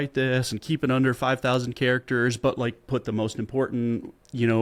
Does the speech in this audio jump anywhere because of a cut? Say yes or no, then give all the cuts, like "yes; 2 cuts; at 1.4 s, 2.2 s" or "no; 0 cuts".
no; 0 cuts